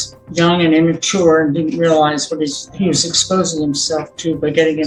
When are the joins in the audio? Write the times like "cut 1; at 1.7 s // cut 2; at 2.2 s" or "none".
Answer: none